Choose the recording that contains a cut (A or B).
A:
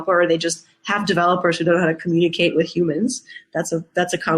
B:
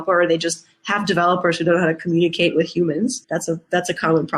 B